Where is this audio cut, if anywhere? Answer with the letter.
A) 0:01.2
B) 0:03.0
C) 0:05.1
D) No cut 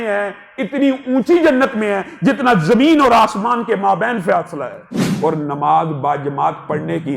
C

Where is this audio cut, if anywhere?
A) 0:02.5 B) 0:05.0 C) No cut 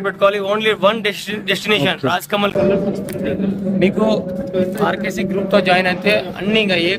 A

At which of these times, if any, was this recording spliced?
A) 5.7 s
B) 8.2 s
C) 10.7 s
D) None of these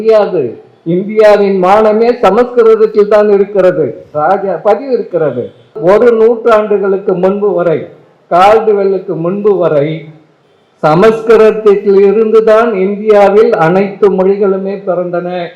A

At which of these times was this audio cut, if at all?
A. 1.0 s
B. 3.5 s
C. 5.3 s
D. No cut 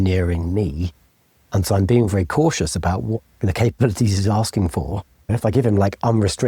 C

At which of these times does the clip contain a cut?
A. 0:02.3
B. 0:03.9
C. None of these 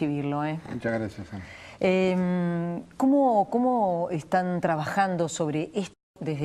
C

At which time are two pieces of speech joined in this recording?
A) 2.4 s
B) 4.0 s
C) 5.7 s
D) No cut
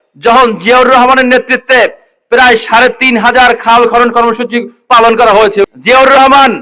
C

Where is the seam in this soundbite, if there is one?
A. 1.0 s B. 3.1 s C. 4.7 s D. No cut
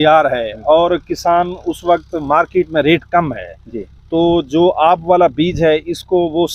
D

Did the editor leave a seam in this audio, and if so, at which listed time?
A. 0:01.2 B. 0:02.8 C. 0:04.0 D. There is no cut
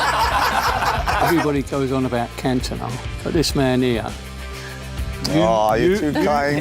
A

